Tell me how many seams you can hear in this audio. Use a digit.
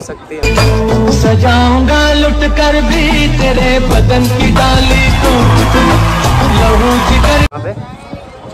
0